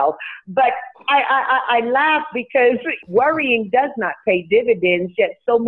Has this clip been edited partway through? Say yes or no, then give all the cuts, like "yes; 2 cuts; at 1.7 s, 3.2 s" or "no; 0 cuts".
yes; 1 cut; at 3.0 s